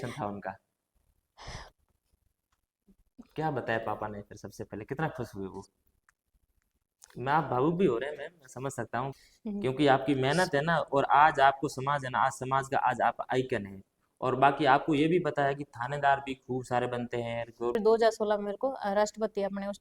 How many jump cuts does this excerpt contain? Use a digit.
2